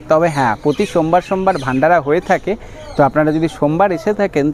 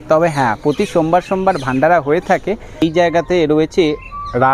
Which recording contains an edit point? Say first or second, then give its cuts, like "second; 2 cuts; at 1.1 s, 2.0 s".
second; 1 cut; at 2.8 s